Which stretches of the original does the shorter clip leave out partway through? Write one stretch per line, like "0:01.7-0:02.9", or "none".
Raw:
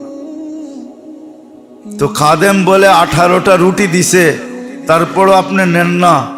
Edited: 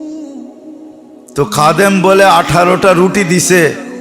0:01.8-0:02.0